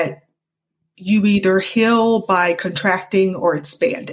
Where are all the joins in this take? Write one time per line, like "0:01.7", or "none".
none